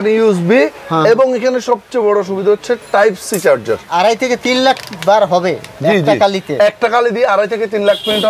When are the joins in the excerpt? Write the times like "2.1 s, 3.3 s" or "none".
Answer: 3.9 s